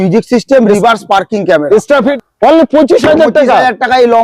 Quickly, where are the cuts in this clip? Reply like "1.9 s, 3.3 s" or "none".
2.1 s